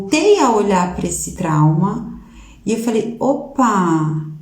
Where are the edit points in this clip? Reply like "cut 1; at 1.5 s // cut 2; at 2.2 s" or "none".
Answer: cut 1; at 1.3 s